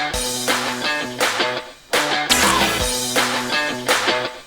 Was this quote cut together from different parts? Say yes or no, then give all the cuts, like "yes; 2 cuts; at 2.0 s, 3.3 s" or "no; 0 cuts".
yes; 1 cut; at 2.2 s